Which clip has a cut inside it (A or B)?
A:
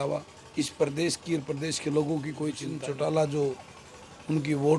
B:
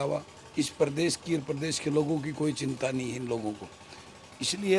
A